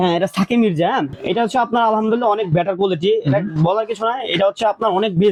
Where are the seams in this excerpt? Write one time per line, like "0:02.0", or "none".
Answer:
none